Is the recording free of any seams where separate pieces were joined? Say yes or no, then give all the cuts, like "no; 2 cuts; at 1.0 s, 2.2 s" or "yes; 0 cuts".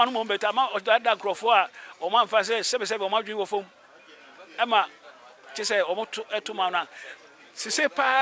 yes; 0 cuts